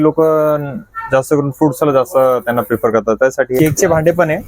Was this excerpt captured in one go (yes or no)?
no